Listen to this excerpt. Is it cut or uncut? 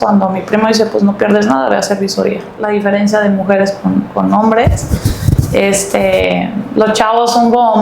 cut